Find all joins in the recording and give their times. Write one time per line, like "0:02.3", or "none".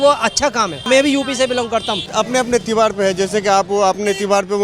0:00.8
0:02.1